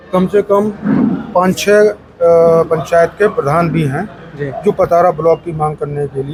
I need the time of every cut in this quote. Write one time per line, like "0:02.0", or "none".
none